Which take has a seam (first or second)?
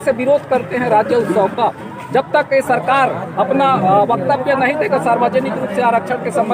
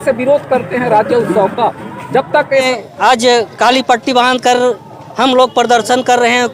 second